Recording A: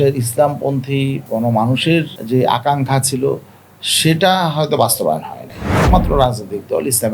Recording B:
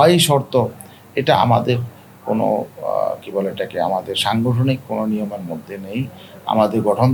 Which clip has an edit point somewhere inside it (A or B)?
A